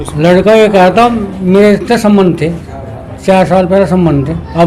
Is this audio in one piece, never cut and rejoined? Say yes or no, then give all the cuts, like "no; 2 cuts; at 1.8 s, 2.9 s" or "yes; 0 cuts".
yes; 0 cuts